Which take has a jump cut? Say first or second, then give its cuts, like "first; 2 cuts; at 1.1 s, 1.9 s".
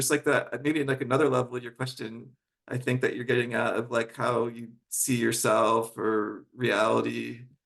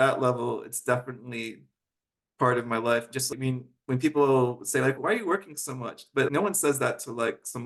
second; 3 cuts; at 3.3 s, 5.0 s, 6.3 s